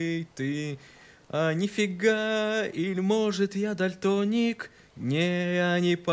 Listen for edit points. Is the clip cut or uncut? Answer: uncut